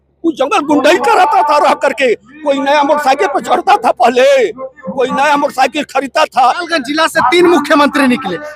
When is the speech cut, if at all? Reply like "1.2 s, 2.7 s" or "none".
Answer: 6.6 s